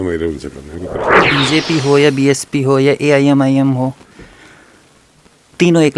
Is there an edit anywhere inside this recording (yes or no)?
yes